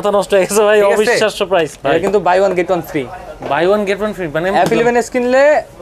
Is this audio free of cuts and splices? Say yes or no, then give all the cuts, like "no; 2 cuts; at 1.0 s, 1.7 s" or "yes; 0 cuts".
no; 1 cut; at 1.8 s